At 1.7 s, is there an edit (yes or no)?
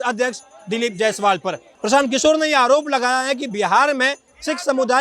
no